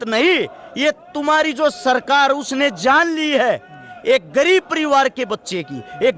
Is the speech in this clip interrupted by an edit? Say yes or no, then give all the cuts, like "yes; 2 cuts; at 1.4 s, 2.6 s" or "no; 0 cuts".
no; 0 cuts